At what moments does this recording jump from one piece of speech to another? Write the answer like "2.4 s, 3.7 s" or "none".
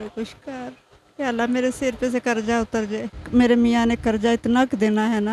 3.1 s

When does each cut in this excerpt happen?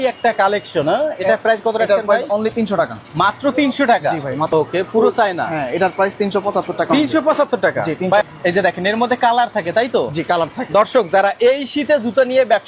4.5 s, 8.2 s

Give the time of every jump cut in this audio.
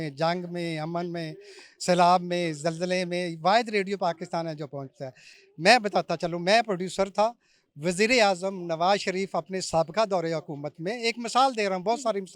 none

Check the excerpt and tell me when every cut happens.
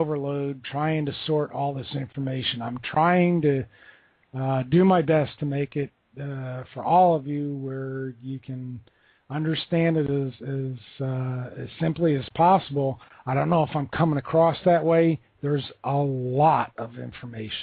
none

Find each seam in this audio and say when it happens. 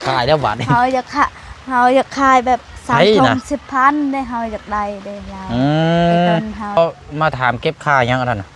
6.8 s

